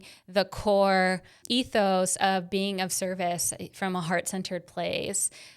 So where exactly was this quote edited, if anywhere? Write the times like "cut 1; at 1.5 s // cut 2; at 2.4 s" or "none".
cut 1; at 1.4 s